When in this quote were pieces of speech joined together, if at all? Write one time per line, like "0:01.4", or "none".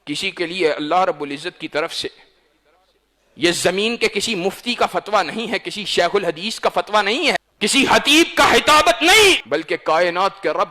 0:07.5
0:09.4